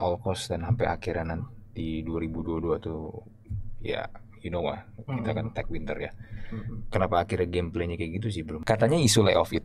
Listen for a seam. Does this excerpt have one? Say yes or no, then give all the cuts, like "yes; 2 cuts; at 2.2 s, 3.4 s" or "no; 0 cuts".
yes; 1 cut; at 8.5 s